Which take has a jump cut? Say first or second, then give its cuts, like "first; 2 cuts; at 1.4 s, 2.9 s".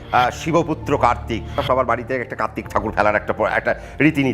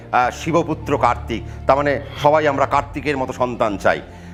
first; 1 cut; at 1.6 s